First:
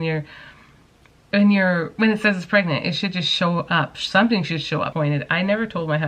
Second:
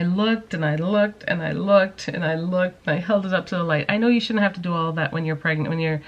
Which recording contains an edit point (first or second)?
first